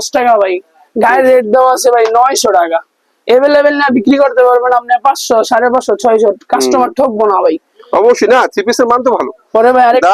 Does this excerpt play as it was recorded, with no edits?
yes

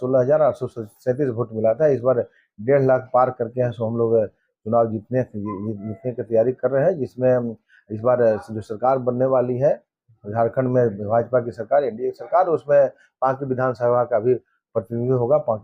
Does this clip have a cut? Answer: no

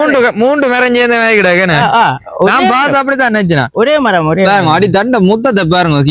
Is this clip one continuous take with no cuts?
yes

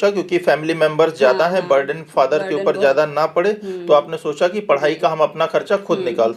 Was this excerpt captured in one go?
yes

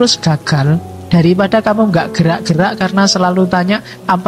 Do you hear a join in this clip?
no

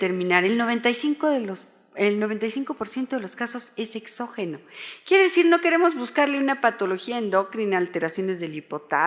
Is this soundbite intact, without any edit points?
no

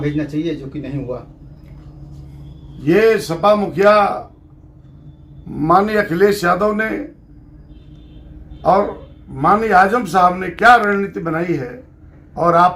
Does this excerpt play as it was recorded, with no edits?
yes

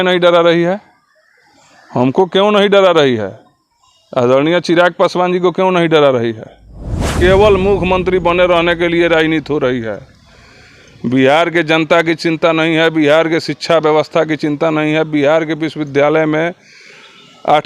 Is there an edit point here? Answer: yes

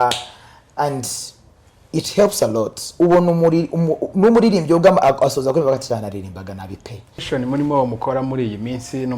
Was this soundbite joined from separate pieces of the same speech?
yes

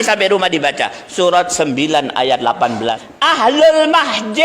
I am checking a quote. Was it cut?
yes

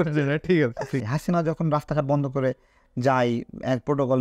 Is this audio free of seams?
no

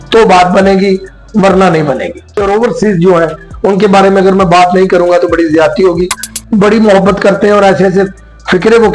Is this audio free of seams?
no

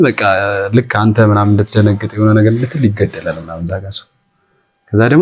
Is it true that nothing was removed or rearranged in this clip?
yes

